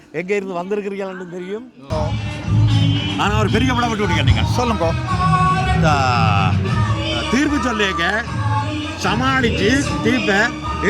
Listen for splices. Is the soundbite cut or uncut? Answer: cut